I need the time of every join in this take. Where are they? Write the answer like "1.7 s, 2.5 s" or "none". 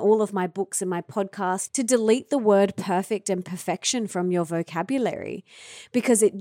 1.6 s